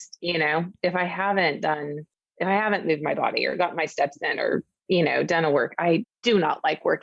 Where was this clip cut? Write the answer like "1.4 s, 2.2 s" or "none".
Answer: 6.1 s